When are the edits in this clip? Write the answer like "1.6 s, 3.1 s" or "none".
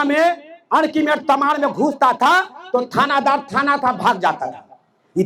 none